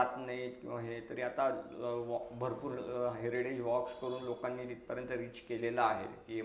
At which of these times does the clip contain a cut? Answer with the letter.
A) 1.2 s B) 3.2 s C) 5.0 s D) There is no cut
D